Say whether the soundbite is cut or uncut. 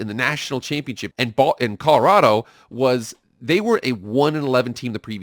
cut